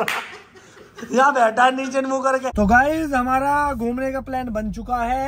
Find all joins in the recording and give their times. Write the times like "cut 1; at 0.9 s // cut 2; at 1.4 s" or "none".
cut 1; at 2.5 s